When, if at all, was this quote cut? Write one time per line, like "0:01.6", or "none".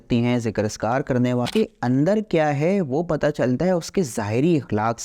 0:01.5

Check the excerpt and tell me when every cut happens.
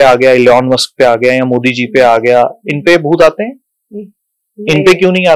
none

